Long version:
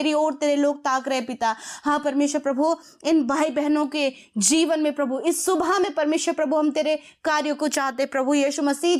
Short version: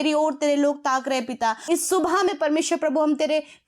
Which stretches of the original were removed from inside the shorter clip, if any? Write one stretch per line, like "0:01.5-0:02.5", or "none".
0:01.6-0:05.2